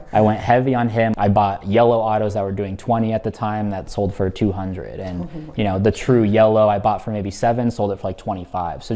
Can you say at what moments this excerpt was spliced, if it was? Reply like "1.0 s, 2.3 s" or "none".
1.1 s